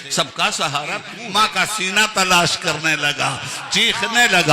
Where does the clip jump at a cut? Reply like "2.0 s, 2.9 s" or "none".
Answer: 1.1 s